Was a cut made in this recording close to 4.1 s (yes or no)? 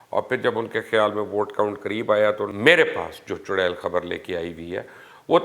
no